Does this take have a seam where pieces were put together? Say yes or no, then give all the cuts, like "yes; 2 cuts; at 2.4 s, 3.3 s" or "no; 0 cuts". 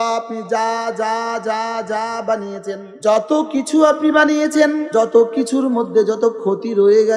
yes; 2 cuts; at 2.9 s, 4.9 s